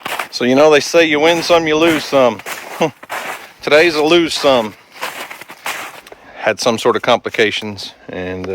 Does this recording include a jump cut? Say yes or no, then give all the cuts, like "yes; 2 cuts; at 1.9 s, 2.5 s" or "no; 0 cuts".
yes; 1 cut; at 6.0 s